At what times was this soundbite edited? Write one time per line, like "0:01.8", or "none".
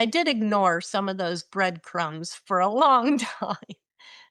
none